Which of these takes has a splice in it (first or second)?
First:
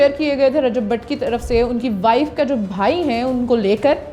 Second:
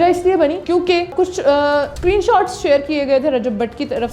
second